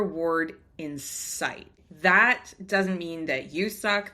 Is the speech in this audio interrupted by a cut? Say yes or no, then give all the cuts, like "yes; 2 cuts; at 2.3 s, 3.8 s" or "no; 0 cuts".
yes; 1 cut; at 1.8 s